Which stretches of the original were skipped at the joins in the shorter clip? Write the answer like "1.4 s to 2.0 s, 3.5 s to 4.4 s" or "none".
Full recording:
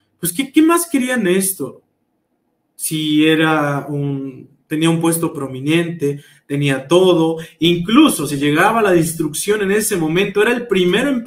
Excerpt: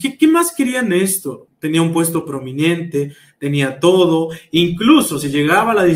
1.8 s to 4.5 s